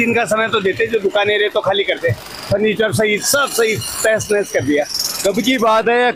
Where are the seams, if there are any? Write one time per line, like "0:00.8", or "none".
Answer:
none

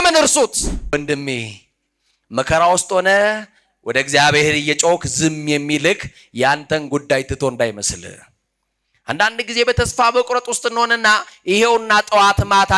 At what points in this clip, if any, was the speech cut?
0:00.9

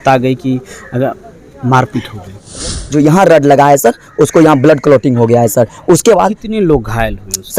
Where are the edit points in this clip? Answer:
0:02.6

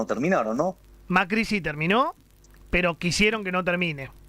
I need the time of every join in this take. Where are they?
0:00.9

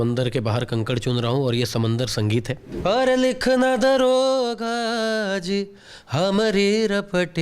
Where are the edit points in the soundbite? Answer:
0:02.6

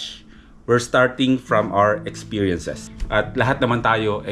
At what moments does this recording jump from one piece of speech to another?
0:03.1

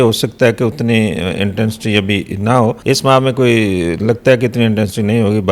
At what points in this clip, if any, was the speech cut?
0:02.8

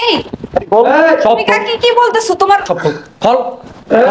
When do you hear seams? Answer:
0:02.7

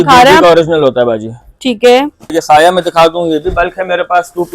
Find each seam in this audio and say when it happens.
0:02.4

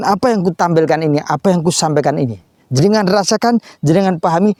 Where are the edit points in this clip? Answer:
none

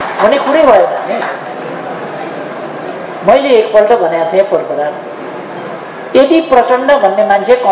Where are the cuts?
none

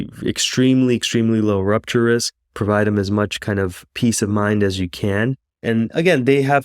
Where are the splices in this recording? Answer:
0:05.5

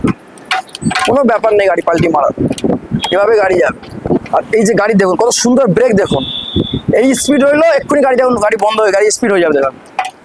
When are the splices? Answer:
none

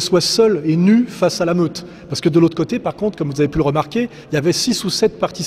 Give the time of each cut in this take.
none

